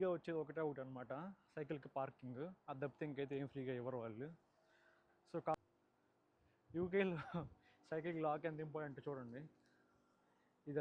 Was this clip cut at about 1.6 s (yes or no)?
no